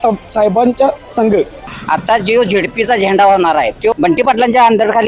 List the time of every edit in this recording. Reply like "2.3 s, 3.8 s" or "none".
1.7 s, 3.9 s